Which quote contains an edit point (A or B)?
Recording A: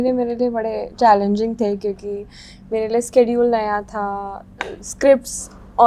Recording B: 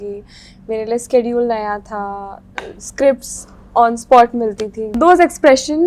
B